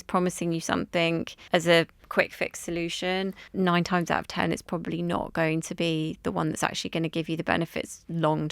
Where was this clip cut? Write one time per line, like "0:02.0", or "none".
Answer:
0:01.4
0:02.0
0:03.4